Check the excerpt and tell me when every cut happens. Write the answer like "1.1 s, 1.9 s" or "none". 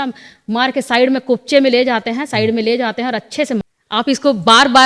3.7 s

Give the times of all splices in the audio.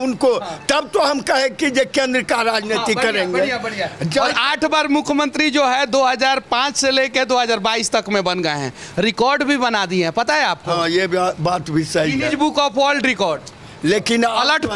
none

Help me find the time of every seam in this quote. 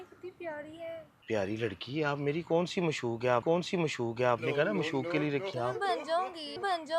1.1 s

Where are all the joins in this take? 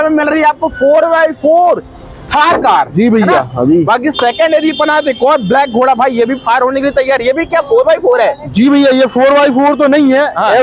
none

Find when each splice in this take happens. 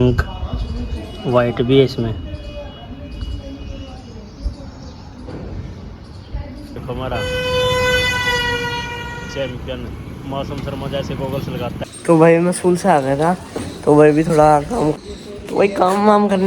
6.8 s, 11.8 s, 14.9 s

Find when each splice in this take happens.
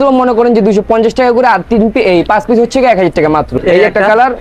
3.5 s

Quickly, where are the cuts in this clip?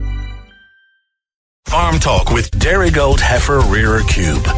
1.6 s

